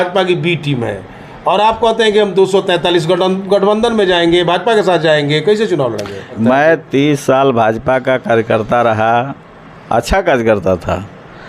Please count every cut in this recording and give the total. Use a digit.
1